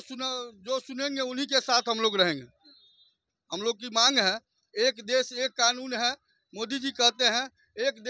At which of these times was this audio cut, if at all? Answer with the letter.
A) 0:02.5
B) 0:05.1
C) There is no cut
C